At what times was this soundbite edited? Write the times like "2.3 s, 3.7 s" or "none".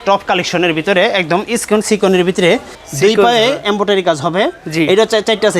2.8 s